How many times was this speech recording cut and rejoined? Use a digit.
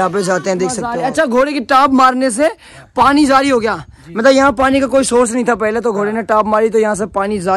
1